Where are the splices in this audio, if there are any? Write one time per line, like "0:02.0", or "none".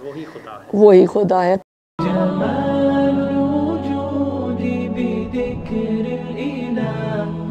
0:01.6